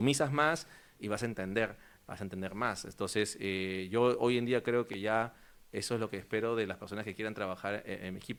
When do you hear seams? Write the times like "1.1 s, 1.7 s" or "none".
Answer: none